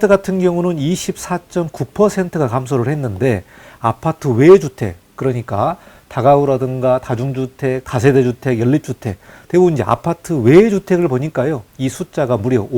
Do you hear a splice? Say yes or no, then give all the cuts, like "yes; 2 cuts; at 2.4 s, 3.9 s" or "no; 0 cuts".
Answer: yes; 1 cut; at 11.7 s